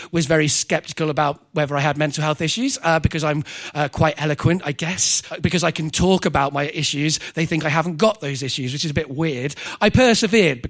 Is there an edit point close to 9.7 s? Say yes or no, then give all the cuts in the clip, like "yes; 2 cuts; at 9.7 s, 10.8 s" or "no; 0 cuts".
yes; 2 cuts; at 5.2 s, 9.7 s